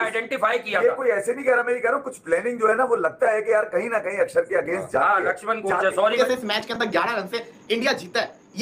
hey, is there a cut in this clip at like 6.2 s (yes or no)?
yes